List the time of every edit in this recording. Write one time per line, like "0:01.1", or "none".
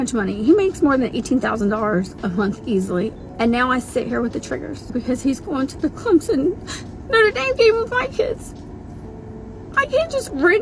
0:03.1
0:04.9

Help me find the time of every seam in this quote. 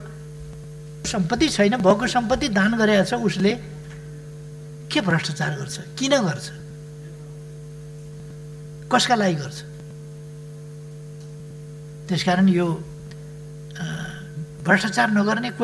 0:01.1

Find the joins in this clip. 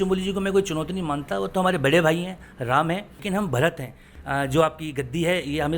0:03.2
0:04.1

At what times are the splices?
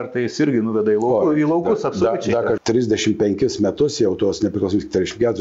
0:02.6

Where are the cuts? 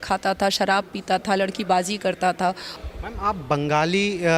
0:02.7

